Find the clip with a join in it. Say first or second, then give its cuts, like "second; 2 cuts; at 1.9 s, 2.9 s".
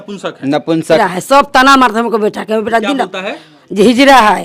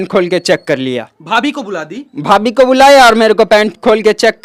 first; 1 cut; at 1.0 s